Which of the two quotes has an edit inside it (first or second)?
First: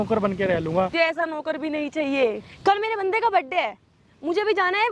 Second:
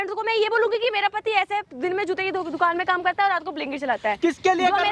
first